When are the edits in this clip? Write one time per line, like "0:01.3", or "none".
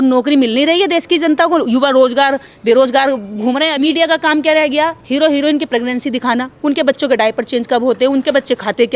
0:03.7